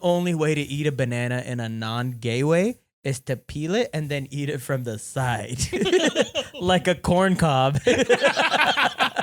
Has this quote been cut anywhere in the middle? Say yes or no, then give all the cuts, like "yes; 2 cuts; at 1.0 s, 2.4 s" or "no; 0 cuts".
no; 0 cuts